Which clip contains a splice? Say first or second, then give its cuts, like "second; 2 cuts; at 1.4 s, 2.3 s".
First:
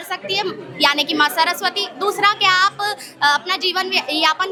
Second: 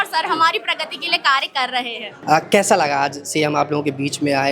second; 1 cut; at 2.1 s